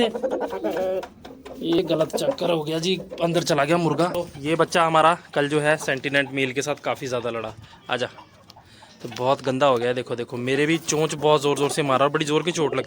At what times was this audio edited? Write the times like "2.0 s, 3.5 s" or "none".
1.8 s, 4.1 s